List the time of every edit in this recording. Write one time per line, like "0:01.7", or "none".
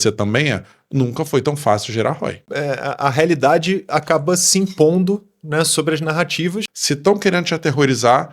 0:02.5
0:06.7

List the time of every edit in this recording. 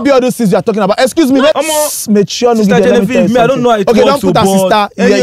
0:01.5

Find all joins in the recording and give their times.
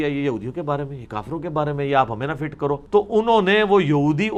none

